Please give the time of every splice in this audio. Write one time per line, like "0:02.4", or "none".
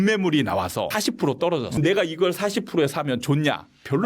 0:01.3